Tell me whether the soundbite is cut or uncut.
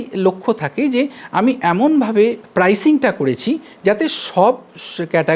cut